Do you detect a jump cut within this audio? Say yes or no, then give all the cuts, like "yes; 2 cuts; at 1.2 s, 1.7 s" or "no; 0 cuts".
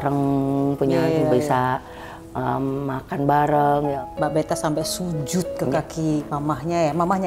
yes; 1 cut; at 3.9 s